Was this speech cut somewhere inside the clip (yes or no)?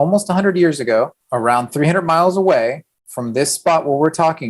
yes